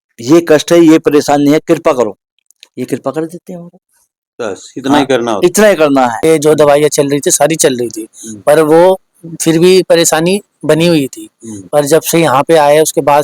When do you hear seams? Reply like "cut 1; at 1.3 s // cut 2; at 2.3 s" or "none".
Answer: cut 1; at 6.2 s